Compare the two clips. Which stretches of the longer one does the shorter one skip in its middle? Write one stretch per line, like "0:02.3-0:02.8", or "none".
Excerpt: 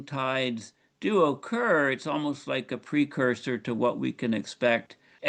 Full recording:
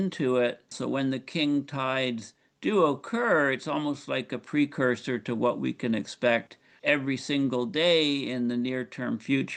none